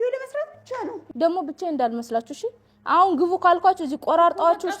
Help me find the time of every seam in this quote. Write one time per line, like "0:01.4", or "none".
0:01.0